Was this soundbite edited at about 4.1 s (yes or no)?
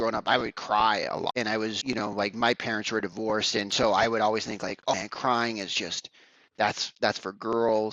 no